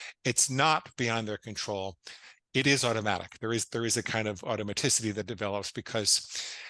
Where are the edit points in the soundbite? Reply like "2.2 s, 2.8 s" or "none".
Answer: none